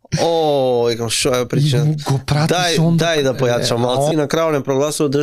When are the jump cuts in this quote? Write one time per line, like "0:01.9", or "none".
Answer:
0:04.1